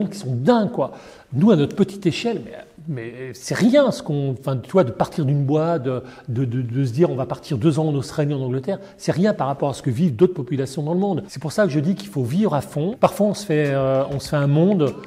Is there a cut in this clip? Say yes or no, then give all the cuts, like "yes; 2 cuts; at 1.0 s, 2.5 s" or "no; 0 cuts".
yes; 2 cuts; at 11.3 s, 12.9 s